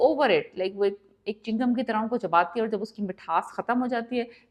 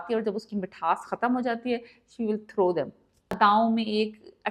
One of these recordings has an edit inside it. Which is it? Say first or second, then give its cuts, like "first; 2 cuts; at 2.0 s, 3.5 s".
second; 1 cut; at 3.4 s